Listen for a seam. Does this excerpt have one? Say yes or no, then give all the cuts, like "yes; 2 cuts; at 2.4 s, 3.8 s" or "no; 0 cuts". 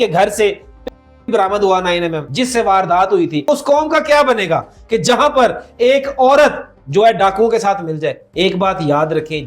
yes; 3 cuts; at 2.2 s, 3.5 s, 8.2 s